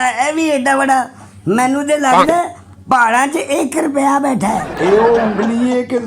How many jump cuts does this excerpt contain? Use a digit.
1